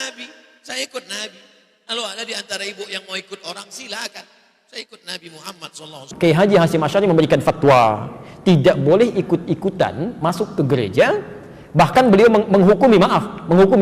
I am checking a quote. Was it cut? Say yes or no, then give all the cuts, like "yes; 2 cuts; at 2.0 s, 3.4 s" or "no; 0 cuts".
yes; 1 cut; at 6.0 s